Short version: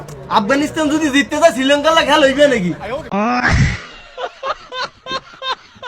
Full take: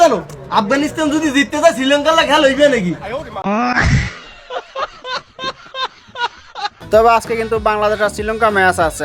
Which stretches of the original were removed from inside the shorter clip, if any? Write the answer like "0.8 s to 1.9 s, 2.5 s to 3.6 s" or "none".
3.3 s to 3.4 s